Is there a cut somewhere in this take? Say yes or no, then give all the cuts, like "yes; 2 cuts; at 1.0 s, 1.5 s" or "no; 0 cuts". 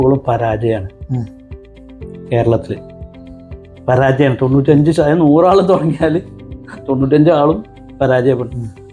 no; 0 cuts